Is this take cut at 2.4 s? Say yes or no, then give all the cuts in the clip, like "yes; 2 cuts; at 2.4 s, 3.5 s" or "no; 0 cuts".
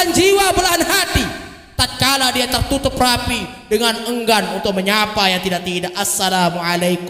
no; 0 cuts